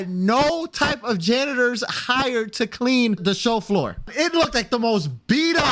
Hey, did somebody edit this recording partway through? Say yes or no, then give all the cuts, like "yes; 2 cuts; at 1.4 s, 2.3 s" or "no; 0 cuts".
yes; 2 cuts; at 3.2 s, 4.1 s